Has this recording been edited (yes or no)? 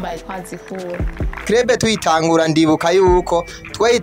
yes